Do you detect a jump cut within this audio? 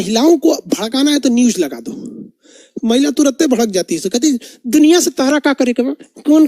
no; 0 cuts

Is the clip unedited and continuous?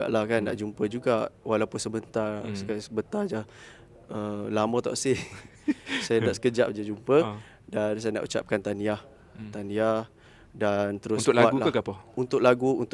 yes; 0 cuts

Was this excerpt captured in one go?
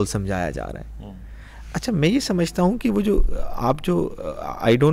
yes; 0 cuts

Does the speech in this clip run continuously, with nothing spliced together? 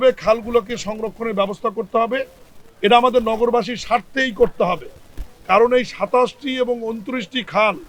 yes; 0 cuts

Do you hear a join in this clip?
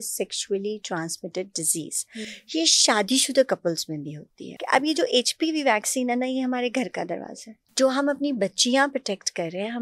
yes; 2 cuts; at 4.6 s, 7.6 s

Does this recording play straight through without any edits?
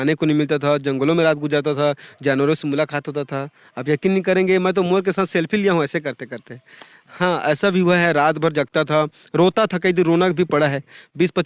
yes; 0 cuts

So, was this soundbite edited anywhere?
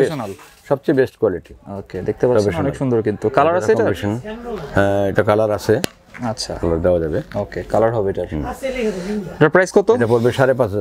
no; 0 cuts

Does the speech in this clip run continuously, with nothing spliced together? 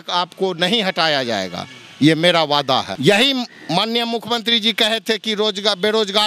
no; 1 cut; at 2.9 s

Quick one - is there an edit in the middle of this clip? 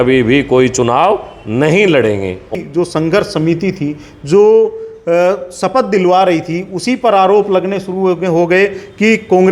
yes; 1 cut; at 2.5 s

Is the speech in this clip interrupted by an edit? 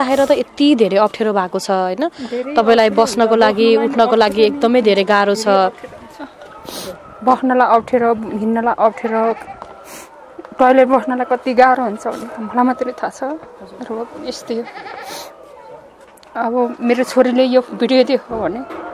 no; 0 cuts

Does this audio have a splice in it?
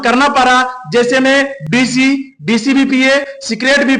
no; 0 cuts

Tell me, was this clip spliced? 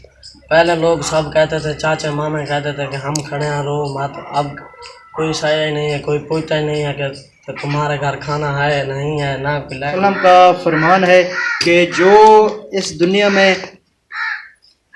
yes; 1 cut; at 9.9 s

